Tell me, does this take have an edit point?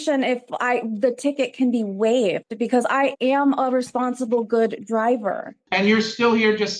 yes; 1 cut; at 5.5 s

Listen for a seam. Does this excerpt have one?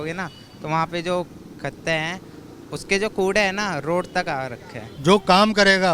yes; 1 cut; at 4.8 s

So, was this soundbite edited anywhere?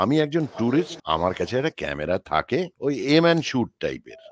yes; 2 cuts; at 1.0 s, 2.7 s

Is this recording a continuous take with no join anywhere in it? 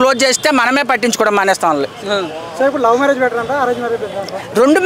yes; 0 cuts

